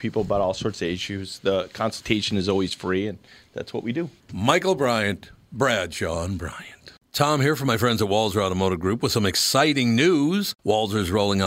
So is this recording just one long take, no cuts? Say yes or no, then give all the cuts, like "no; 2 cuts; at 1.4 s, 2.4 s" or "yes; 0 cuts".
no; 1 cut; at 7.0 s